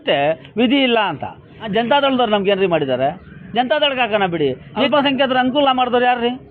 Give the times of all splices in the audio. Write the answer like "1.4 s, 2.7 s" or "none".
1.7 s, 4.9 s